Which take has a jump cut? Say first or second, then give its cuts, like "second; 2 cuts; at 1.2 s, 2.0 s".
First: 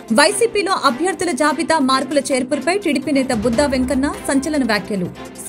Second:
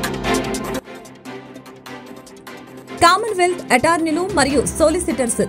second; 1 cut; at 0.9 s